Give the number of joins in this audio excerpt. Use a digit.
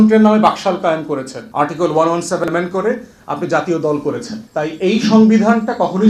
2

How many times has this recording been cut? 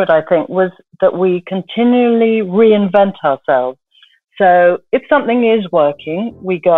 0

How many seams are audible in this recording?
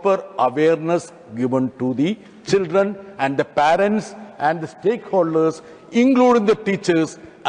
0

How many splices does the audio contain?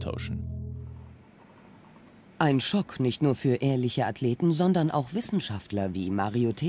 1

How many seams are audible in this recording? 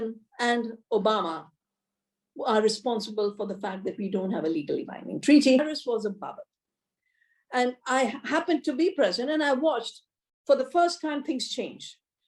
1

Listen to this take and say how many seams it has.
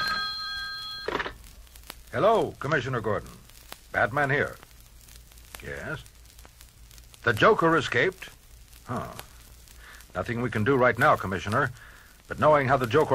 1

